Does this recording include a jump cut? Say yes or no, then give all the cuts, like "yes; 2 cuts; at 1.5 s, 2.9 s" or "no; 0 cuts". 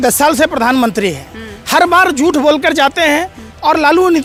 no; 0 cuts